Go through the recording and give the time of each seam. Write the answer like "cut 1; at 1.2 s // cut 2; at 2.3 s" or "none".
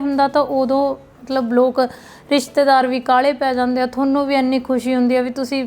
none

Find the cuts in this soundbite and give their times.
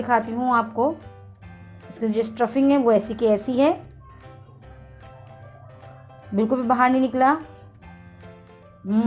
none

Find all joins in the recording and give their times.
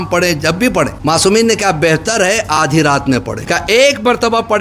cut 1; at 0.9 s // cut 2; at 3.4 s

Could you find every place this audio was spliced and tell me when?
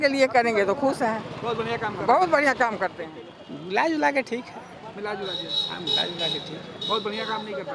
cut 1; at 3.0 s

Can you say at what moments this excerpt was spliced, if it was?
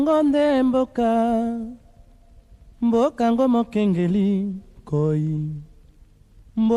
none

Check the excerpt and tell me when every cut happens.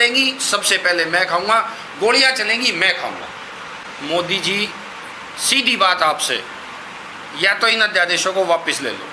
cut 1; at 3.8 s

